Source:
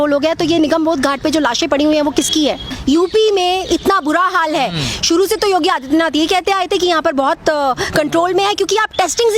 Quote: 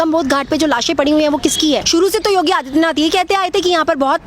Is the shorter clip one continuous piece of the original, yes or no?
no